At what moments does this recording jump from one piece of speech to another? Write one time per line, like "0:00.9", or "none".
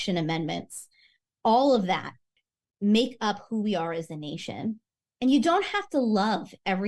0:02.3
0:05.0